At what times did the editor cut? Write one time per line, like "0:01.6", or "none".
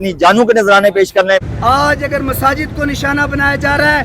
0:01.4